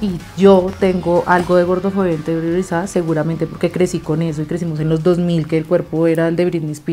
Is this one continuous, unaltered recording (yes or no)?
yes